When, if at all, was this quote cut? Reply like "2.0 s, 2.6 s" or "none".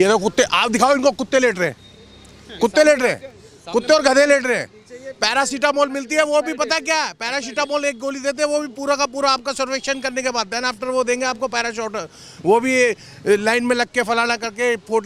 none